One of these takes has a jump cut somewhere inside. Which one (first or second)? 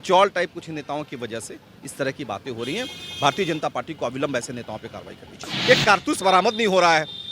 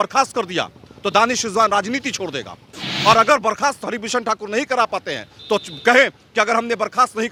first